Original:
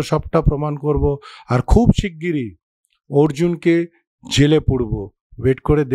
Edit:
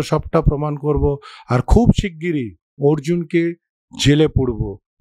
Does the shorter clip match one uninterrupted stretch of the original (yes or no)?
no